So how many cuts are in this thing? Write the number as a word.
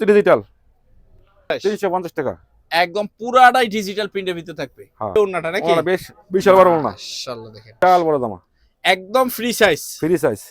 three